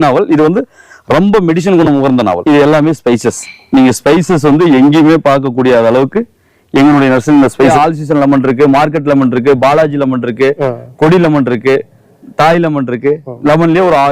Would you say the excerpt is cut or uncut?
cut